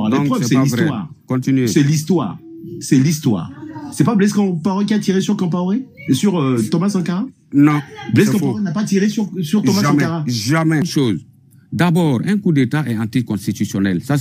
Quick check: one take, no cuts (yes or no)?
no